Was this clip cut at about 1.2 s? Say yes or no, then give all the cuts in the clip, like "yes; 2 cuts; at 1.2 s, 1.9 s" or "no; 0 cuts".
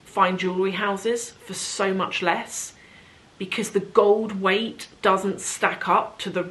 no; 0 cuts